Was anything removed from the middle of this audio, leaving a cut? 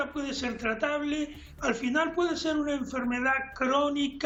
no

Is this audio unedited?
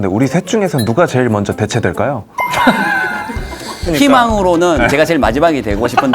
no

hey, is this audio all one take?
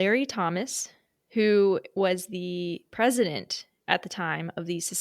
yes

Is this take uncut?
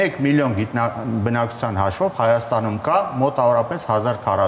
yes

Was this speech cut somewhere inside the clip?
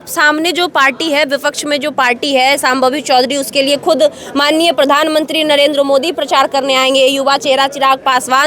no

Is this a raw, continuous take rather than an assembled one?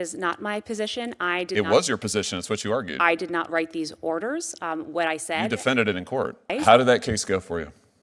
no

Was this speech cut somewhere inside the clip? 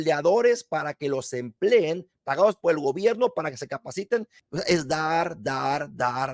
yes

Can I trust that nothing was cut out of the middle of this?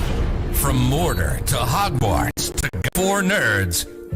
no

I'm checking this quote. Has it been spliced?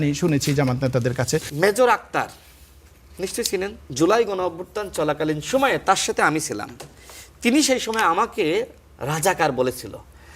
yes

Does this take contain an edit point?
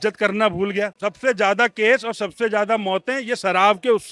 no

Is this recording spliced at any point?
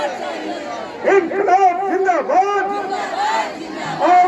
no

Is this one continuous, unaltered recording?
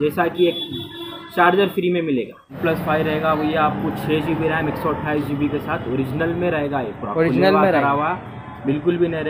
no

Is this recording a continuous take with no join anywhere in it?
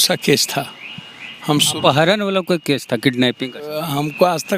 yes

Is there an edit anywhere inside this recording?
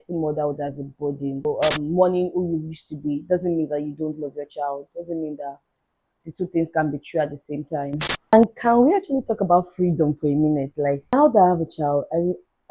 yes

